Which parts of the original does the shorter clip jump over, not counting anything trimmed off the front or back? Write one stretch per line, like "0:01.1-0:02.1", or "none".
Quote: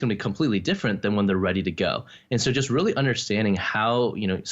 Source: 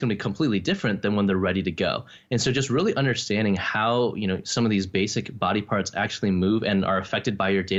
none